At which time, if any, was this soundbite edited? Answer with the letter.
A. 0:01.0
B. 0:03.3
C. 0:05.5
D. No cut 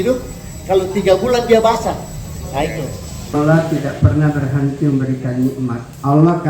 B